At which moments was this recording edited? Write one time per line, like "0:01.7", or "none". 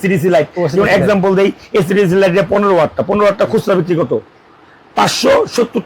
none